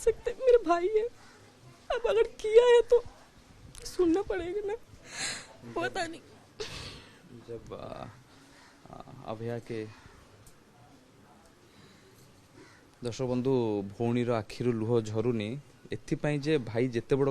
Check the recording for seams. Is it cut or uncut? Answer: uncut